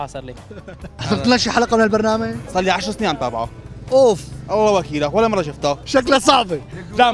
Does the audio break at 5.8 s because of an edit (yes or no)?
yes